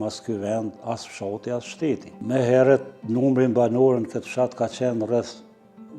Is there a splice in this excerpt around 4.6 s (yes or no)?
no